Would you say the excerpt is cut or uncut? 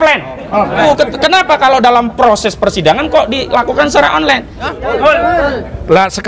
cut